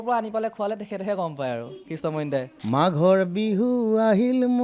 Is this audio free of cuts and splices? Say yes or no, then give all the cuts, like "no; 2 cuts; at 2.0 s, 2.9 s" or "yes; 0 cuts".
no; 1 cut; at 2.5 s